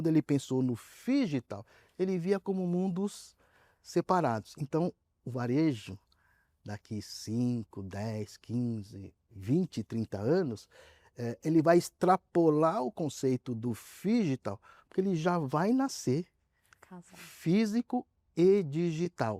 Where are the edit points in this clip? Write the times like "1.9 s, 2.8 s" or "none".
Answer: none